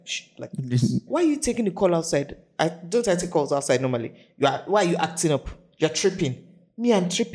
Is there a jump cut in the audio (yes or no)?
yes